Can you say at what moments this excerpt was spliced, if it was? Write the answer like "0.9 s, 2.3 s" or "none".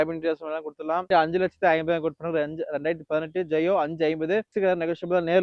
1.1 s

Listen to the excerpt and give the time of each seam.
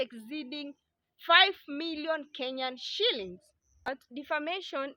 4.0 s

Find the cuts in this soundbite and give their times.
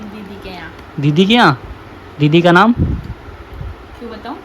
none

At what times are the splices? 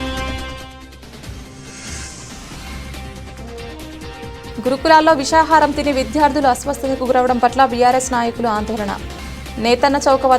4.4 s

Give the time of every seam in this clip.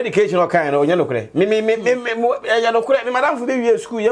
none

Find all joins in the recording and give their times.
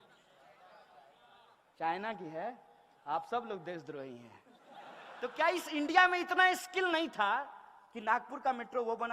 5.0 s

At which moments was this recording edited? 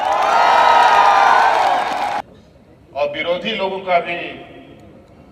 2.2 s

